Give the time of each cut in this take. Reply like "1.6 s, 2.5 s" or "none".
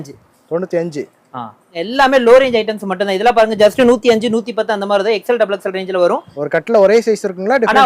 1.8 s, 6.3 s

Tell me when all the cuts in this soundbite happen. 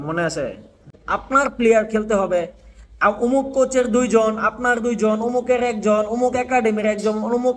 1.0 s

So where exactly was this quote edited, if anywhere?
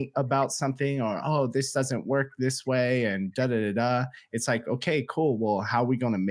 none

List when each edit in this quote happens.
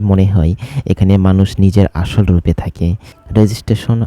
3.1 s

